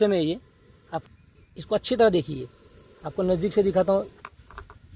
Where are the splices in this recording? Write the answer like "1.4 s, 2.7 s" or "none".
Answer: 1.0 s